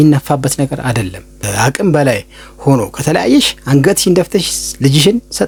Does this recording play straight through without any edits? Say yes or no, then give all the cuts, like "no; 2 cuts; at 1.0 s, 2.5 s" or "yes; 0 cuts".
yes; 0 cuts